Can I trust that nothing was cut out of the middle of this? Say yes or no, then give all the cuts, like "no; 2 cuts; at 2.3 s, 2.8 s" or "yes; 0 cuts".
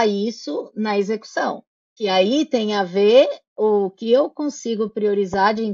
yes; 0 cuts